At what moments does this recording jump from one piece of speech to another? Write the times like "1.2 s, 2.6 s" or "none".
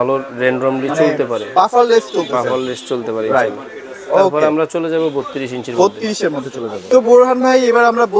none